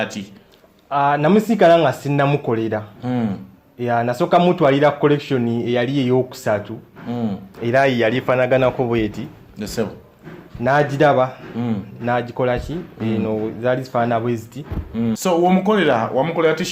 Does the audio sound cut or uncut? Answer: cut